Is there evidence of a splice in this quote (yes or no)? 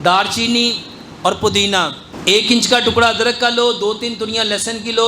yes